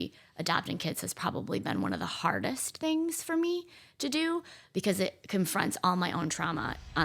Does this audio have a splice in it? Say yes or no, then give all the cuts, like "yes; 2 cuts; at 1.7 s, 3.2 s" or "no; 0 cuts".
no; 0 cuts